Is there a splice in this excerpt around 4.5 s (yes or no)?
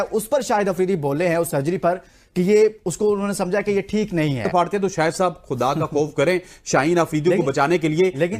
yes